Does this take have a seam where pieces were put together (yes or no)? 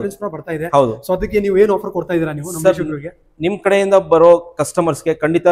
no